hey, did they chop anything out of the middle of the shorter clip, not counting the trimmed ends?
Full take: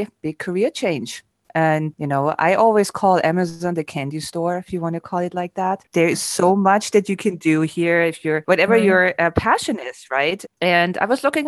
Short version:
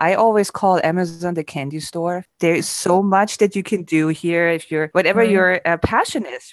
yes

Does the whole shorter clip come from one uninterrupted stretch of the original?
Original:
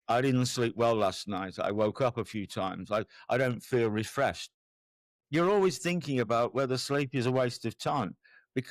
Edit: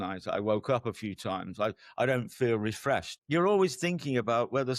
no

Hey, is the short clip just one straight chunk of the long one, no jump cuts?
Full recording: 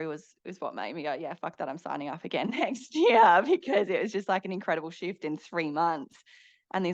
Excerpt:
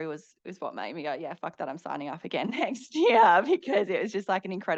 yes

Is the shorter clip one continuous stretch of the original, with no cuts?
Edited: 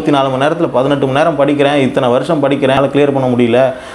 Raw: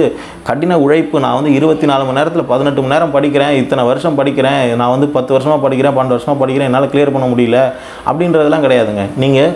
no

